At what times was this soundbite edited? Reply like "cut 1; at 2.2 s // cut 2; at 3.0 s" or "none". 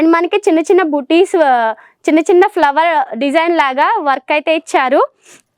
none

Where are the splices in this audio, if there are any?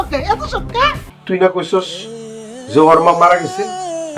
cut 1; at 1.1 s

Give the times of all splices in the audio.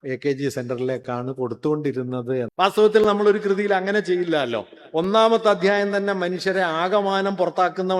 cut 1; at 2.5 s

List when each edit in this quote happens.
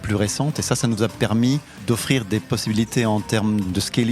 cut 1; at 1.7 s

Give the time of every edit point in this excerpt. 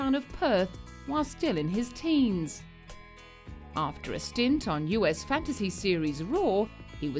cut 1; at 6.2 s

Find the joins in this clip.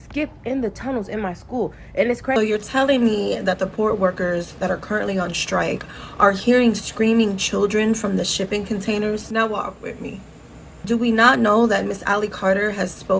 cut 1; at 2.4 s

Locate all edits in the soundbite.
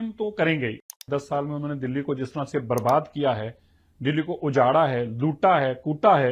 cut 1; at 1.0 s

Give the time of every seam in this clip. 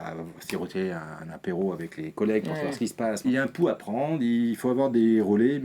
cut 1; at 3.2 s

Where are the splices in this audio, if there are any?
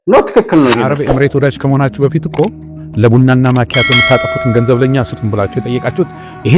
cut 1; at 1.0 s

